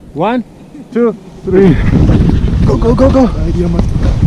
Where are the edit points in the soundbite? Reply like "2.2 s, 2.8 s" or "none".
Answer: 1.8 s